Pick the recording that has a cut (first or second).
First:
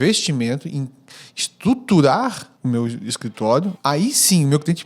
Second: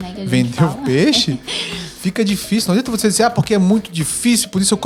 first